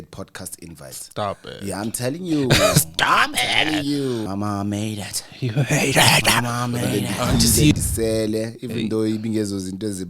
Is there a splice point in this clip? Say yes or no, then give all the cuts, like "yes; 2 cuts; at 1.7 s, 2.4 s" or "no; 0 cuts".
yes; 2 cuts; at 4.3 s, 7.7 s